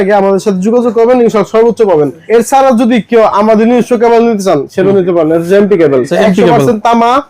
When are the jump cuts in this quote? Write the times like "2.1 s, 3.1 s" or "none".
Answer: 2.2 s, 6.1 s